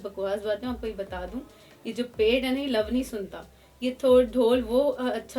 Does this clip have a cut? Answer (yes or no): no